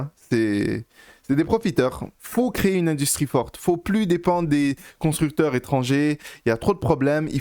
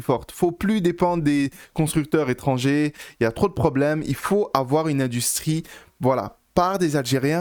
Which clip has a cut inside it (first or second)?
first